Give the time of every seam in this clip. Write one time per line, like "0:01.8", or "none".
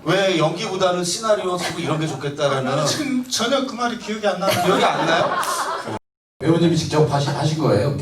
0:05.9